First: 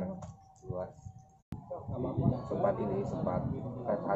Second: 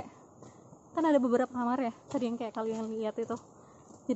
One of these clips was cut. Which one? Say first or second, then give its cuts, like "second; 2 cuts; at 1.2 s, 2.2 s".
first; 1 cut; at 1.5 s